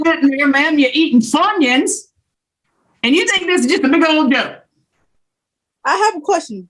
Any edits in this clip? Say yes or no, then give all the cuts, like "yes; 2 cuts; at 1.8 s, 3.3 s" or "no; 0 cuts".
no; 0 cuts